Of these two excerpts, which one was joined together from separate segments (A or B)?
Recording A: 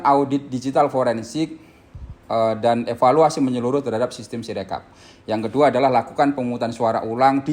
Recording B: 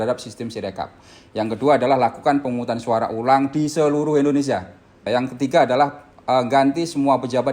B